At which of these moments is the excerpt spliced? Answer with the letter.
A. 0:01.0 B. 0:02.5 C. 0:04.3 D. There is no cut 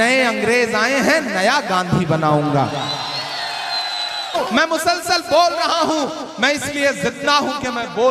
C